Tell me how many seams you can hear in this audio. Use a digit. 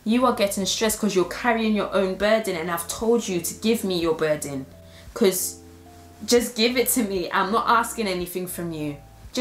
0